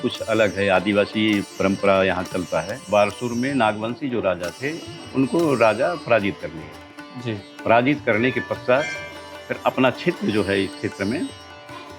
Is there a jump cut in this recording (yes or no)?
yes